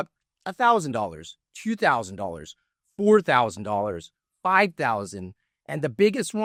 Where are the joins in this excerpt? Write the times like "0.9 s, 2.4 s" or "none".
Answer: none